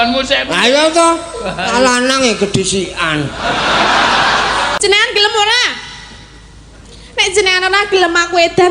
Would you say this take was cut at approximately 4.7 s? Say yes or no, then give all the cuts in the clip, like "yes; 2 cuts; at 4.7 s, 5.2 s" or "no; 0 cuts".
yes; 1 cut; at 4.7 s